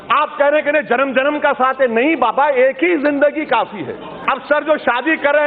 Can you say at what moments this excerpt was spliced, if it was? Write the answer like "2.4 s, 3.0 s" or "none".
4.2 s